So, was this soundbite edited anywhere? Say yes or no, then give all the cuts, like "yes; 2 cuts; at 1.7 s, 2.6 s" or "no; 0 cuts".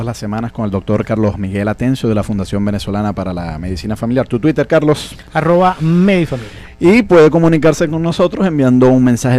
no; 0 cuts